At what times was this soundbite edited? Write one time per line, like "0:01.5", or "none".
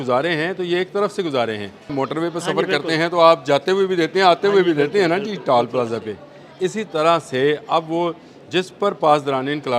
0:01.9